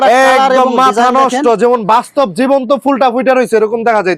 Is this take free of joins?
yes; 0 cuts

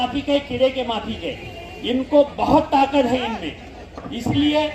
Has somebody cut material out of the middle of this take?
no; 0 cuts

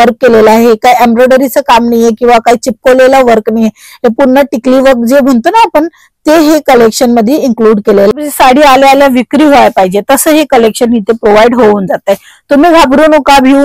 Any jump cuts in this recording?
yes; 1 cut; at 8.3 s

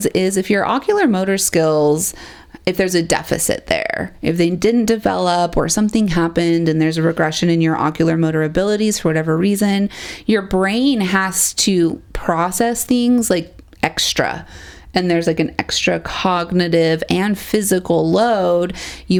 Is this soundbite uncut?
yes; 0 cuts

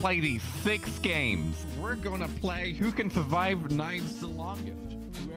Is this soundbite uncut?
no; 1 cut; at 1.6 s

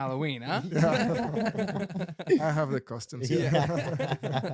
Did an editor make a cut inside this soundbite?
no; 0 cuts

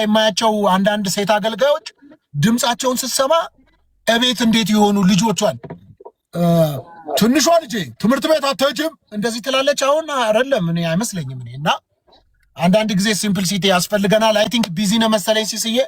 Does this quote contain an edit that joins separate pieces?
no; 0 cuts

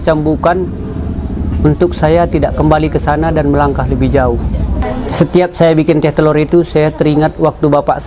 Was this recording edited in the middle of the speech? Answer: yes; 1 cut; at 4.8 s

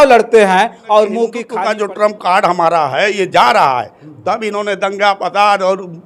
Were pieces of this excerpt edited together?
yes; 1 cut; at 1.4 s

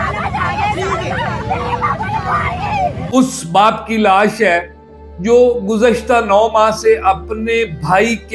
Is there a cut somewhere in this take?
yes; 1 cut; at 3.0 s

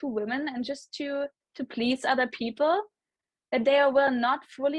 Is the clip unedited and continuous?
yes; 0 cuts

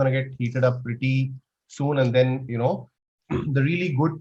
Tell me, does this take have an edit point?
yes; 1 cut; at 3.0 s

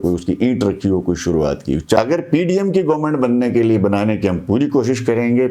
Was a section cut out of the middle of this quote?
yes; 1 cut; at 2.0 s

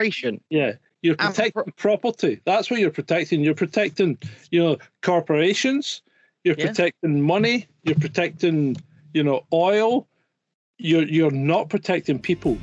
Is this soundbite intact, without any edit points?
yes; 0 cuts

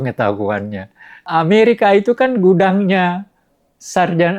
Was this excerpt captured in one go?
no; 1 cut; at 1.2 s

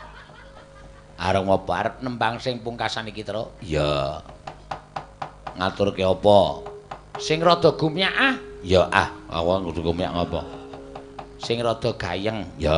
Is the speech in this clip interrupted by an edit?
no; 0 cuts

